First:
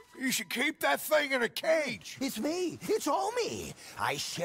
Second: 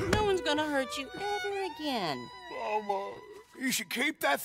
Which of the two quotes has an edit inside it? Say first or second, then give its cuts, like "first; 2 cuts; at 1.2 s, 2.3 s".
first; 1 cut; at 2.0 s